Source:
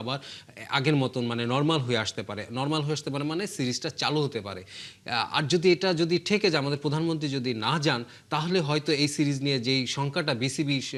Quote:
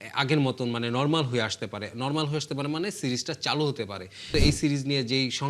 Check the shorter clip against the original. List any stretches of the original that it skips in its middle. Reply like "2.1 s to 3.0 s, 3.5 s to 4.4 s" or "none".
4.8 s to 8.8 s